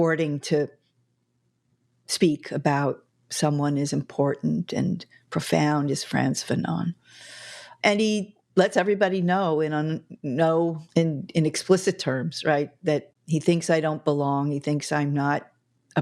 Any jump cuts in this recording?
yes; 2 cuts; at 7.7 s, 10.8 s

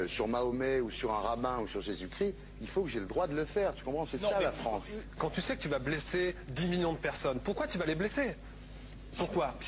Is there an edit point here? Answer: no; 0 cuts

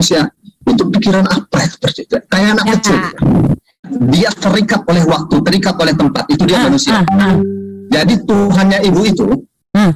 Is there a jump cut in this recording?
yes; 1 cut; at 3.9 s

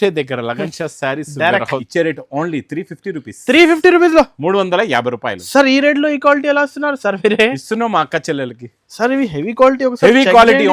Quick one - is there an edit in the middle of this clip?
yes; 1 cut; at 1.9 s

